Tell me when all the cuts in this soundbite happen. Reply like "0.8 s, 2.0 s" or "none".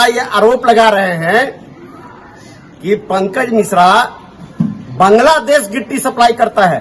none